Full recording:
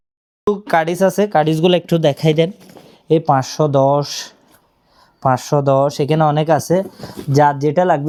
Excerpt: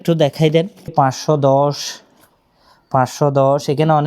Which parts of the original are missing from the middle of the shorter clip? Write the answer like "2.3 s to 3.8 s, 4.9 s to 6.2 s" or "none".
2.8 s to 3.2 s